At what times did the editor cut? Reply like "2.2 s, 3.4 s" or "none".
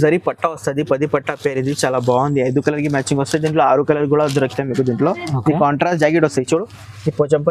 none